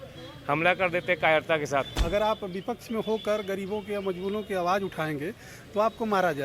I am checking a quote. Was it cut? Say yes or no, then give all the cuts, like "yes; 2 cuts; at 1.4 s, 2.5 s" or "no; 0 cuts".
yes; 1 cut; at 2.0 s